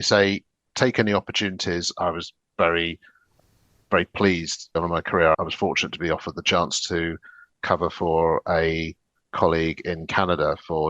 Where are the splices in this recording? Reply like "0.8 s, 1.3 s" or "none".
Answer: none